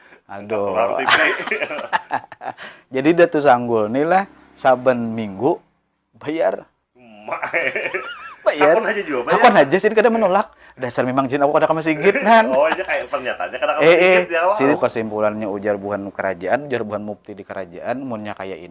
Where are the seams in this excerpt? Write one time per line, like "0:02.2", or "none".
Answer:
0:14.8